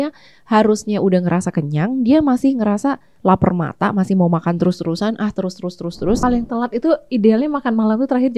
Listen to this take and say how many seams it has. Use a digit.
1